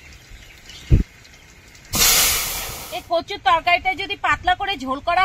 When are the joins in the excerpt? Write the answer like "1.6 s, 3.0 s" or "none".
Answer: 2.7 s